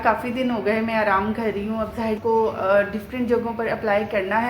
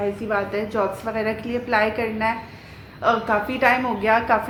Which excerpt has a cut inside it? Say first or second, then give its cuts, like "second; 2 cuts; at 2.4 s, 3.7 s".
first; 1 cut; at 2.2 s